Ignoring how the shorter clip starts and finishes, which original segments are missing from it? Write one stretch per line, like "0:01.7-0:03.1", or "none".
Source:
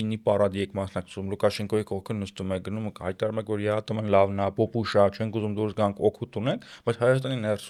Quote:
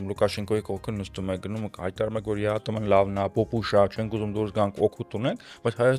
none

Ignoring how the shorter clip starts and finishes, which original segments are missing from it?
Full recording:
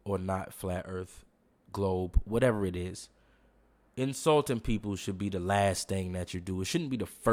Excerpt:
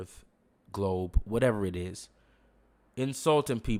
none

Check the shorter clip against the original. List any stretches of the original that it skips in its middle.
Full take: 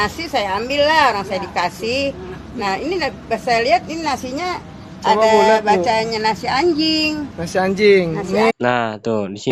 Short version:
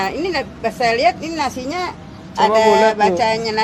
none

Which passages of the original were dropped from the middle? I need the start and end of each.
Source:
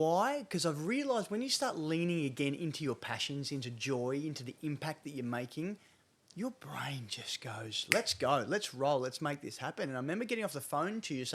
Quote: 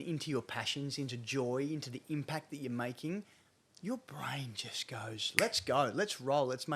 none

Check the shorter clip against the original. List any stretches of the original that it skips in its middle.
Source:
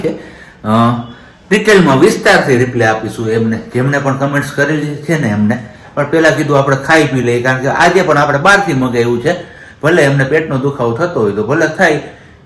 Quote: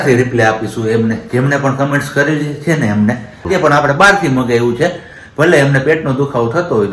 0:05.9-0:07.9

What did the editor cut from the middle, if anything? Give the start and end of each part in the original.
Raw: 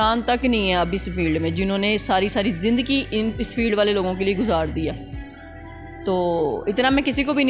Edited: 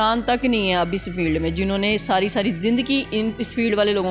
none

